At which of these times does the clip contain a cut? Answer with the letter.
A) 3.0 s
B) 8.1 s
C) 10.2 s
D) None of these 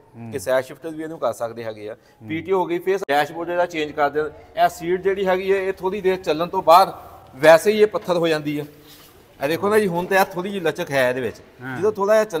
A